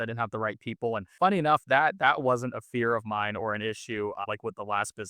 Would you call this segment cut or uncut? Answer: cut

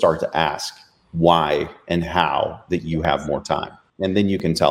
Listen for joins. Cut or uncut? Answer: cut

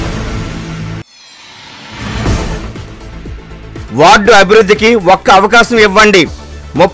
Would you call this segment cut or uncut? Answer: cut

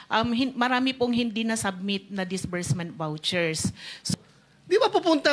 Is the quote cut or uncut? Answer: cut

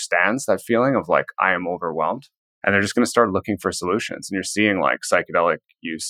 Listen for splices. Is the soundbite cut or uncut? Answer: uncut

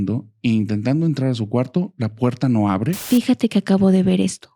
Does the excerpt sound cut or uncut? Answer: cut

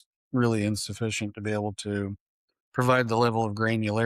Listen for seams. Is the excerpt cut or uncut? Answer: uncut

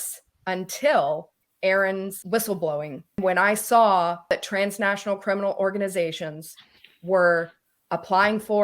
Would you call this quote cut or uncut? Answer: cut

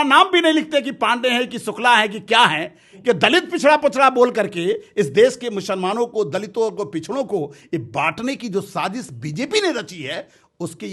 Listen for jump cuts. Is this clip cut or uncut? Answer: uncut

